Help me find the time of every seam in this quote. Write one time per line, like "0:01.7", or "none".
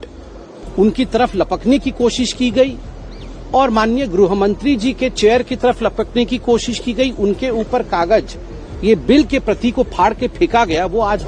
none